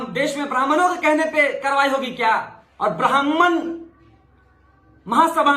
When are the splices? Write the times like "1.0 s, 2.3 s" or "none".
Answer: 2.6 s

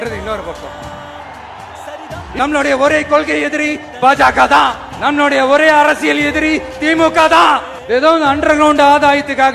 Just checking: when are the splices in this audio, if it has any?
2.2 s, 7.7 s

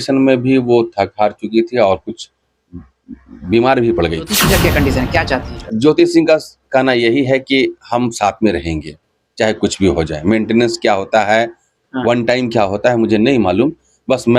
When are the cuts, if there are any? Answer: 4.4 s

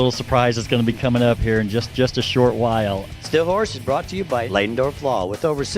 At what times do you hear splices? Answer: 3.1 s

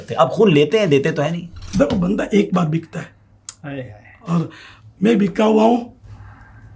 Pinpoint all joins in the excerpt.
1.6 s

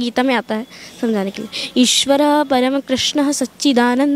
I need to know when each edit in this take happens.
none

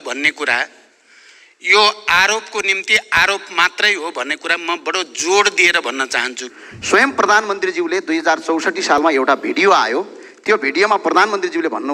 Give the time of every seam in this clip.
6.4 s

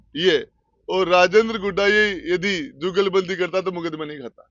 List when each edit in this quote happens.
none

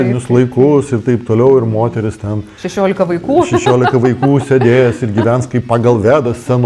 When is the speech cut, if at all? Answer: none

